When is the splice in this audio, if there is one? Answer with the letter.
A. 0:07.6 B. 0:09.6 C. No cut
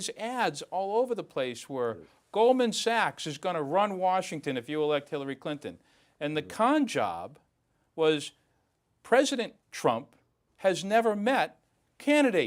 B